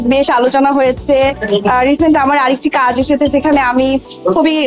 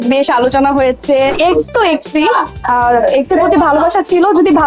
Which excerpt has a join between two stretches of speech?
second; 1 cut; at 1.4 s

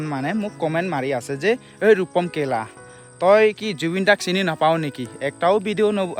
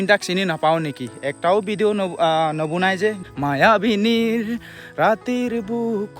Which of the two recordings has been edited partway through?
second; 1 cut; at 3.2 s

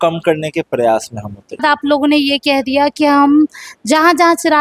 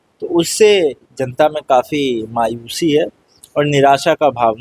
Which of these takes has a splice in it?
first; 1 cut; at 1.6 s

